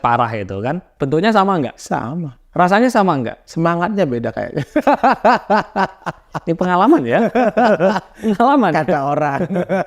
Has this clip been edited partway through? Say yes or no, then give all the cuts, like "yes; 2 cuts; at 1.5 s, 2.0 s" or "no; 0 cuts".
yes; 3 cuts; at 0.9 s, 1.8 s, 3.4 s